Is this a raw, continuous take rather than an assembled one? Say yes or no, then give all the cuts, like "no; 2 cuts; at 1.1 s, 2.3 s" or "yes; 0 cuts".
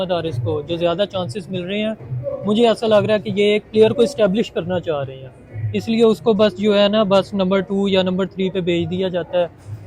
yes; 0 cuts